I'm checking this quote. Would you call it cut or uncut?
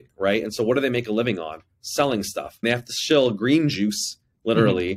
cut